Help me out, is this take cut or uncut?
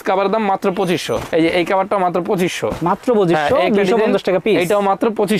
uncut